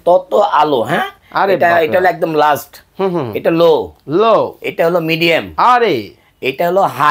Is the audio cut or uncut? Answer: uncut